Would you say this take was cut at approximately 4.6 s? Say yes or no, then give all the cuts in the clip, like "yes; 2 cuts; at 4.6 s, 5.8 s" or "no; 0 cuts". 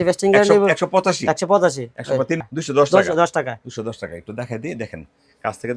no; 1 cut; at 2.4 s